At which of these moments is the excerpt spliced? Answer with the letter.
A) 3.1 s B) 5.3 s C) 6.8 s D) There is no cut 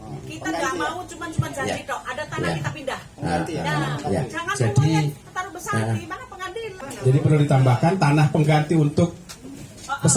C